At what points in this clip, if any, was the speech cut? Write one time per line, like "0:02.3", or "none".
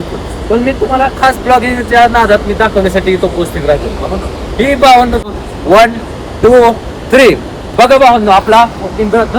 0:05.3